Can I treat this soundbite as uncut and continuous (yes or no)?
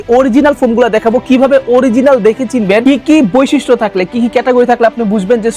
yes